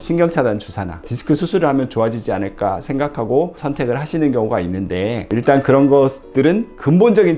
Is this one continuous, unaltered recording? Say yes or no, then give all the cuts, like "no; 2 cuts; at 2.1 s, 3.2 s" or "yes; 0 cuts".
no; 2 cuts; at 1.1 s, 3.5 s